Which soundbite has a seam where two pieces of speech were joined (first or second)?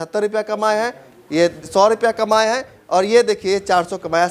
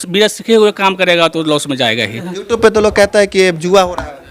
second